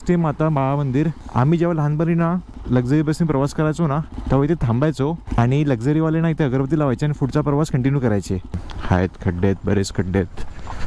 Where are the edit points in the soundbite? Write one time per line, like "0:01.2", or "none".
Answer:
0:01.2
0:02.5
0:04.1
0:05.2
0:08.6

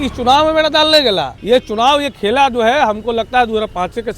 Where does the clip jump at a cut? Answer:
0:01.3

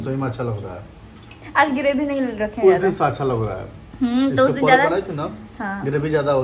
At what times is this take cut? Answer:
none

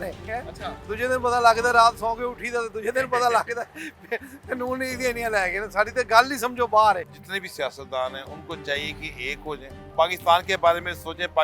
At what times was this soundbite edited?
0:07.2
0:09.7

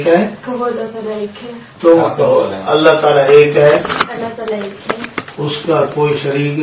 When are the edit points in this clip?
none

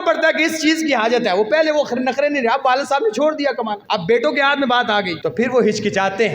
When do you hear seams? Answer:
0:03.8
0:05.1

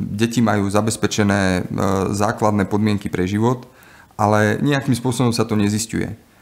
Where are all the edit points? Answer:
none

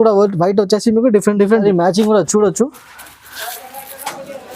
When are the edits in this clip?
0:01.6

